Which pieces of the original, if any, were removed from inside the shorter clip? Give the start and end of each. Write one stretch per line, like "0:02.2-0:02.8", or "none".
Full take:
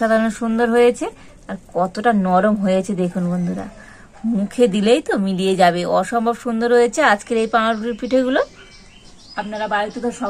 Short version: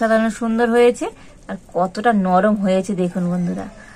none